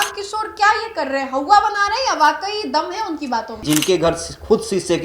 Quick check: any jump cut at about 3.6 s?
yes; 1 cut; at 3.6 s

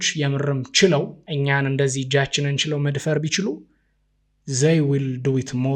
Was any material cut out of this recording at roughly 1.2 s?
yes; 1 cut; at 1.2 s

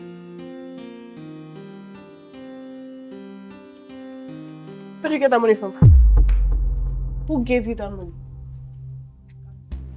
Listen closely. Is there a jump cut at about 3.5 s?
no; 1 cut; at 1.1 s

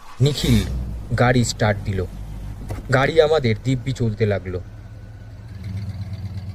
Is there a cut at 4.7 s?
yes; 1 cut; at 4.7 s

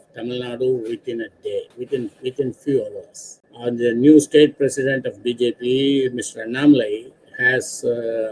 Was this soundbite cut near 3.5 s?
yes; 2 cuts; at 1.8 s, 3.5 s

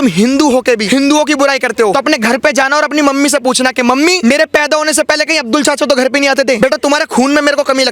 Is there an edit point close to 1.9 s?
yes; 4 cuts; at 0.8 s, 1.9 s, 4.2 s, 6.6 s

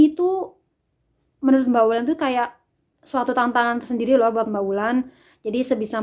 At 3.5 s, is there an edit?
no; 0 cuts

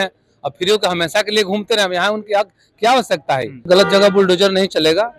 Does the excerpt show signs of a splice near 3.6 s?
yes; 1 cut; at 3.6 s

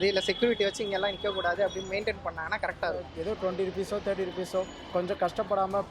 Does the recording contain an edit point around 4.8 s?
no; 1 cut; at 3.1 s

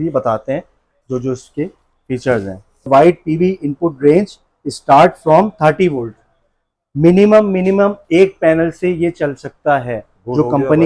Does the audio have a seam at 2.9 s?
yes; 1 cut; at 2.9 s

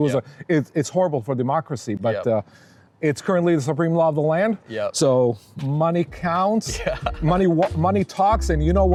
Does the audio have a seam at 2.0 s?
no; 0 cuts

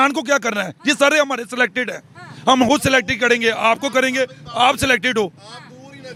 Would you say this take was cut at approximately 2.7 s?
no; 0 cuts

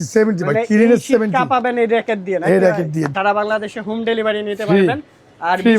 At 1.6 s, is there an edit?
no; 1 cut; at 3.1 s

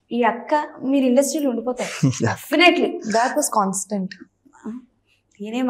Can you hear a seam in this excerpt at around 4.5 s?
no; 0 cuts

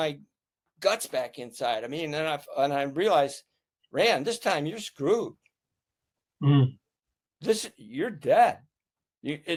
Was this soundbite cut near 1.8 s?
no; 0 cuts

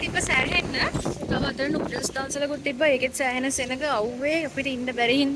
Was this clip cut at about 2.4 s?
no; 1 cut; at 0.9 s

